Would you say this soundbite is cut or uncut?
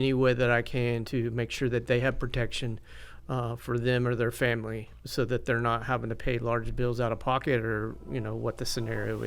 uncut